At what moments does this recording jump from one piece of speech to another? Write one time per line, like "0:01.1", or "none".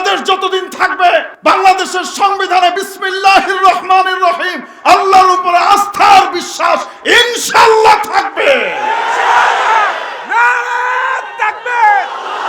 0:01.3